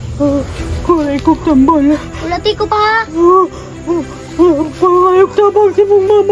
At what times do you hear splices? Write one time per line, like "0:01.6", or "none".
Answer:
none